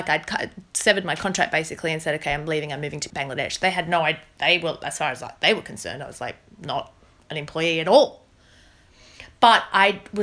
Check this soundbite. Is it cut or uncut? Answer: cut